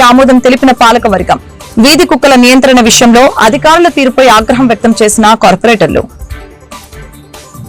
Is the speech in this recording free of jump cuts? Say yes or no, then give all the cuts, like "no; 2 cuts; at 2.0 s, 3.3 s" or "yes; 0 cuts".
yes; 0 cuts